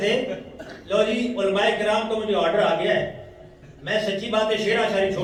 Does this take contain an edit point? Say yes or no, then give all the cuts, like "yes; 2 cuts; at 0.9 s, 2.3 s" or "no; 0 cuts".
no; 0 cuts